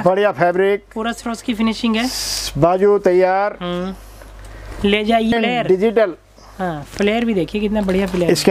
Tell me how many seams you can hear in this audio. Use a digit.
1